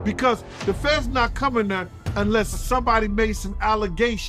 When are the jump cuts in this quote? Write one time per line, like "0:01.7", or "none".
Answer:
0:02.6